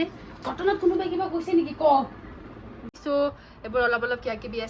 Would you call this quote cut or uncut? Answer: cut